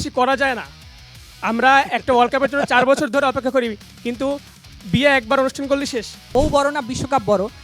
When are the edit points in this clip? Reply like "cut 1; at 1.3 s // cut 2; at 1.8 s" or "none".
cut 1; at 6.2 s